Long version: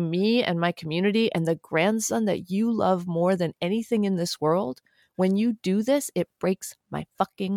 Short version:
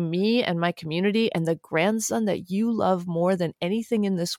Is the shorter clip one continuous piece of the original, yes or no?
yes